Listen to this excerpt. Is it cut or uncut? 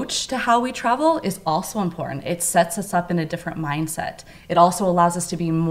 uncut